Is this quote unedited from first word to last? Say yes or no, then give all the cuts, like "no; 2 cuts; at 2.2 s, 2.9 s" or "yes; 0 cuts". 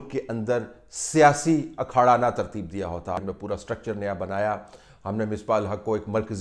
no; 1 cut; at 3.2 s